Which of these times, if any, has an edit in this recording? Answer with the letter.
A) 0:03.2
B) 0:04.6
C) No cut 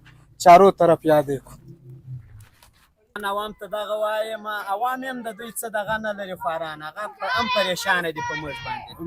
A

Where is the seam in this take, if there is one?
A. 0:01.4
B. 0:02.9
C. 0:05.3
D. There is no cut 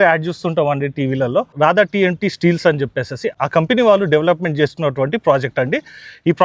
D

